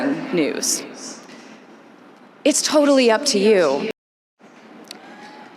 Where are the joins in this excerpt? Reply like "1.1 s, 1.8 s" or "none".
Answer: 3.9 s